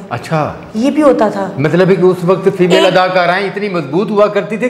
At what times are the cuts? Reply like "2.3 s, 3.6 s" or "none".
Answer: none